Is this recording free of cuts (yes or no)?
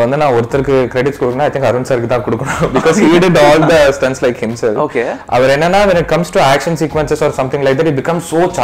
yes